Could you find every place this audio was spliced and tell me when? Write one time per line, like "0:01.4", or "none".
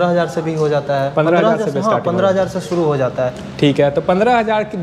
none